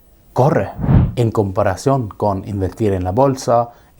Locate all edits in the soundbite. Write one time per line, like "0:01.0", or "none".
0:01.0

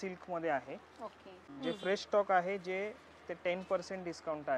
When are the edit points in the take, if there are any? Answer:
0:01.5

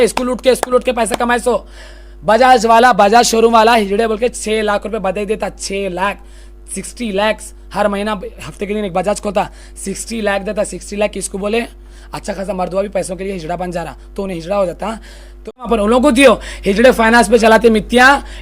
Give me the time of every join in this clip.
0:15.7

